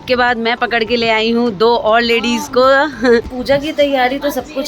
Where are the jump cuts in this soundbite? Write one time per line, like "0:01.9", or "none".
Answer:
0:03.4